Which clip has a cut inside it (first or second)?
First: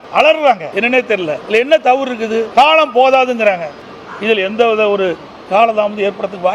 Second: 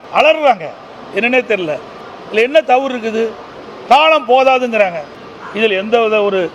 first